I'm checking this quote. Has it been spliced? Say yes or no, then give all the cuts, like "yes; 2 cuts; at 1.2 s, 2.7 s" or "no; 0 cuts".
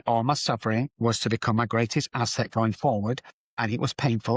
yes; 2 cuts; at 0.9 s, 3.6 s